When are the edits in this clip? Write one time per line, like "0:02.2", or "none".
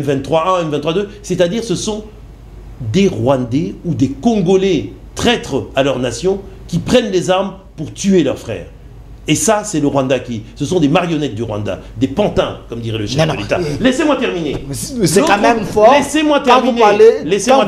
none